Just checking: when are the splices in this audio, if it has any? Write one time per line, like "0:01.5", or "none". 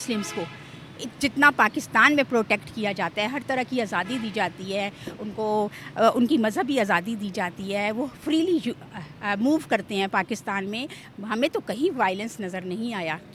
none